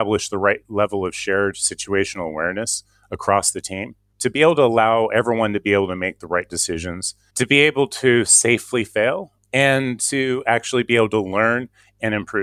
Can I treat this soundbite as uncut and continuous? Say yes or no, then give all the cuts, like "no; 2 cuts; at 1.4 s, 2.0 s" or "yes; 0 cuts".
yes; 0 cuts